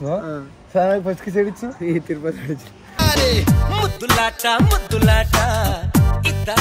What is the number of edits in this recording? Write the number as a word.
zero